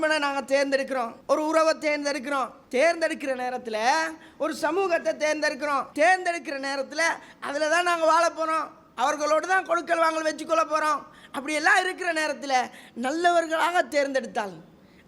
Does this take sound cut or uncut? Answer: cut